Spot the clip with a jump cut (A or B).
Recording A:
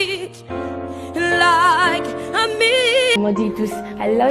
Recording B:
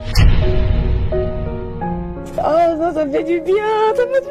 A